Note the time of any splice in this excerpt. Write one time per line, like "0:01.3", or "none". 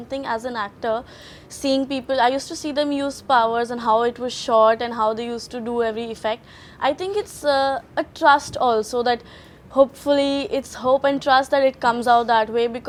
none

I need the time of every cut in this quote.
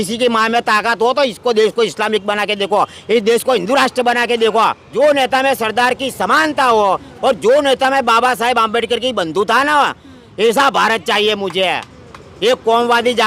0:04.8

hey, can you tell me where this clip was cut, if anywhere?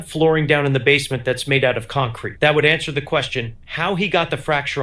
none

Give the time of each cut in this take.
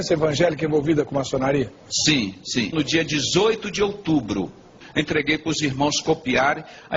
0:04.8

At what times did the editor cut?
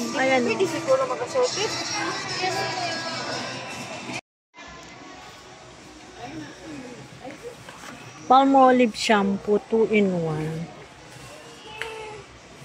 0:04.4

